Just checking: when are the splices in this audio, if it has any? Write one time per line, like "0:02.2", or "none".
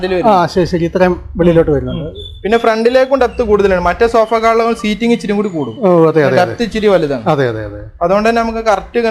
none